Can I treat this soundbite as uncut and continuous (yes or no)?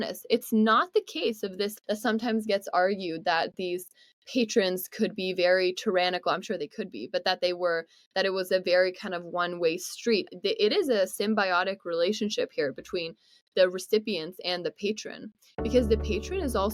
yes